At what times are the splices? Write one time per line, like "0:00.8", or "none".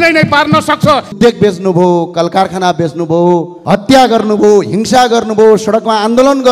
0:01.1
0:03.5